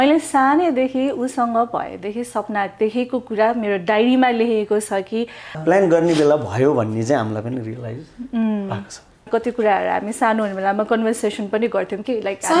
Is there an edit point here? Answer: yes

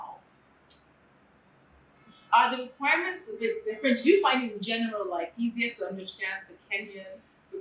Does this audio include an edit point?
no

